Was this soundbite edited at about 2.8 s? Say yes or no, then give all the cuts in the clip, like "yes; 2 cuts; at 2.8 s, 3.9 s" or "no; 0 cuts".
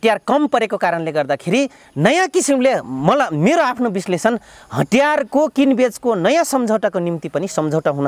no; 0 cuts